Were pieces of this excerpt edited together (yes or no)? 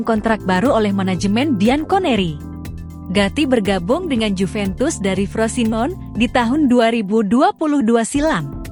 no